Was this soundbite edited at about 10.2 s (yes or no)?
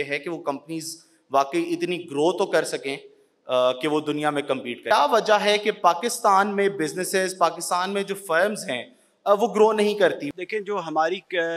yes